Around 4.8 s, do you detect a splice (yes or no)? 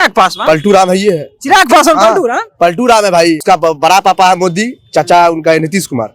no